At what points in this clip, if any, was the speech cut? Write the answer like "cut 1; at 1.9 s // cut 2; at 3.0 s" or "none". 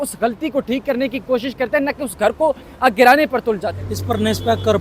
cut 1; at 3.7 s